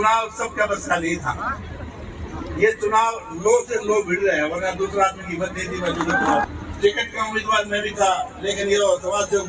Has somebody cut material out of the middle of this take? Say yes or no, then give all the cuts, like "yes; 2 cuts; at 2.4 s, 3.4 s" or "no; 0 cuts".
yes; 1 cut; at 6.4 s